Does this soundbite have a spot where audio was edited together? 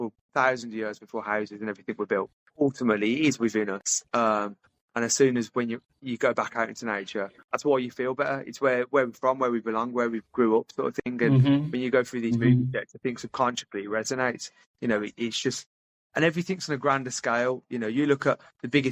yes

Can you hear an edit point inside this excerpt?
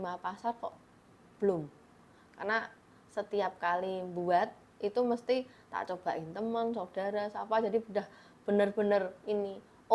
no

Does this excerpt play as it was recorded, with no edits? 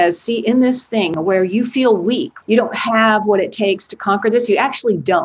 no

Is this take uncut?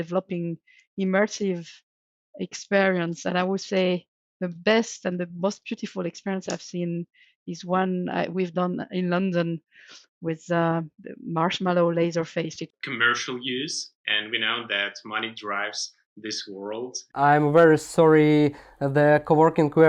no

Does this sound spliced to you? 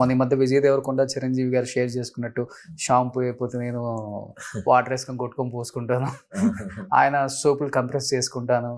no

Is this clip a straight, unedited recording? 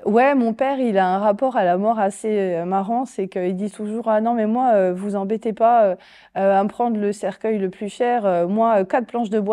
yes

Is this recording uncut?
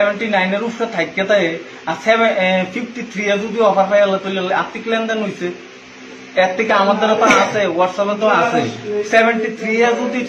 yes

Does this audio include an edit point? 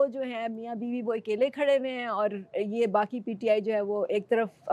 no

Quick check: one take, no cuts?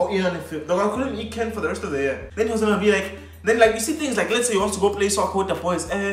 no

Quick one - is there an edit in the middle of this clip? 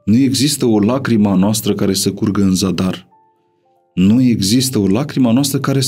no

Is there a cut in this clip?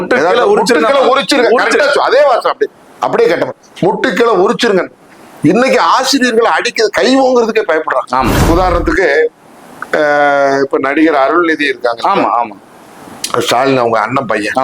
yes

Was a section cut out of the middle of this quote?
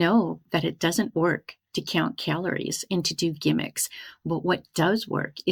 no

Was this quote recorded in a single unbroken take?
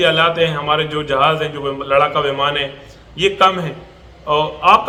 yes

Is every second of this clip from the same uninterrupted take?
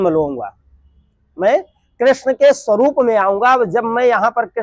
yes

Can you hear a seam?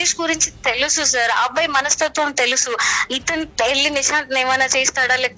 no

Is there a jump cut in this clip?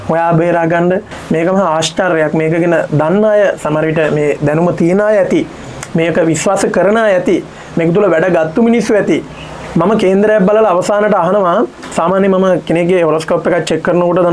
no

